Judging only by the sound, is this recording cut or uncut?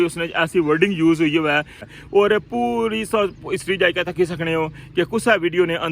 cut